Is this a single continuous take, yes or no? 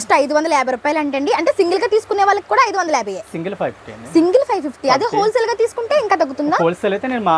yes